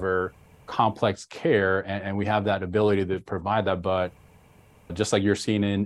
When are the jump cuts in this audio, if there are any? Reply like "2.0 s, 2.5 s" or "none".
none

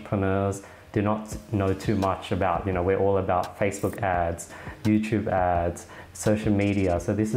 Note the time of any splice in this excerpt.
none

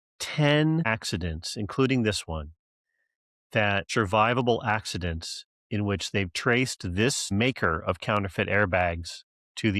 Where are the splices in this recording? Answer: 0.9 s, 3.9 s

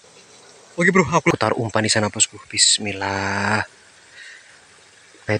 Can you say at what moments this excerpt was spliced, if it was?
1.3 s

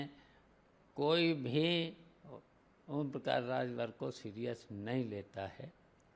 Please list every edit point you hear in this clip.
none

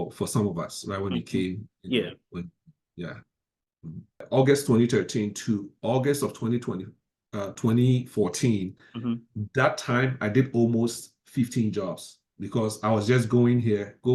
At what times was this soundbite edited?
4.2 s

